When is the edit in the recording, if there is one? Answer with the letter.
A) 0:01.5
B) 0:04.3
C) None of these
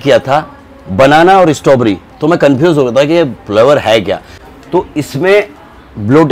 B